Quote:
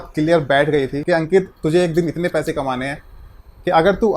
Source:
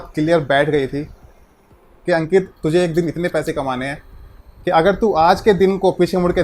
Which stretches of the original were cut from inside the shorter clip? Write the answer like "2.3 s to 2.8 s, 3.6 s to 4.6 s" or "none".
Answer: 1.0 s to 2.0 s